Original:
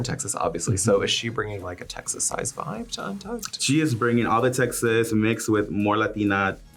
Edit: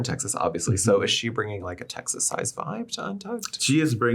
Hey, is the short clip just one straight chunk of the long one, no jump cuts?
yes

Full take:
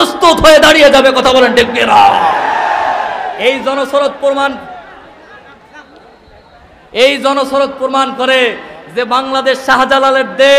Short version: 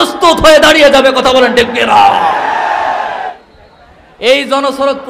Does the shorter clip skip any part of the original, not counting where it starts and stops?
yes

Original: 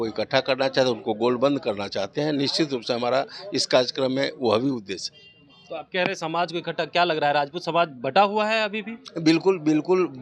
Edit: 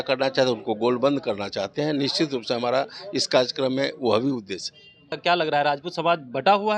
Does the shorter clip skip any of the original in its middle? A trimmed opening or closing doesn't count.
yes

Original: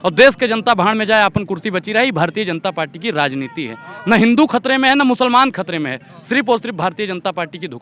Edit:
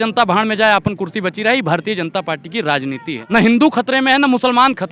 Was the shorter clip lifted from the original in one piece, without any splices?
no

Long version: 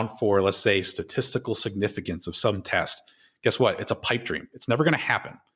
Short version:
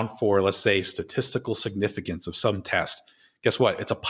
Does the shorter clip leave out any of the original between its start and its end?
no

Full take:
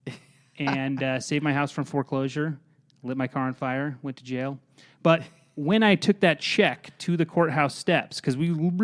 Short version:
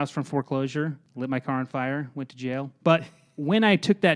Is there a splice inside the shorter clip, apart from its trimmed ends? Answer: yes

